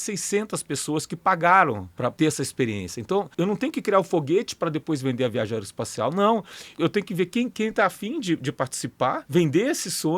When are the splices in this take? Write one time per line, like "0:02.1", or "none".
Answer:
0:02.1
0:03.3
0:06.7
0:09.2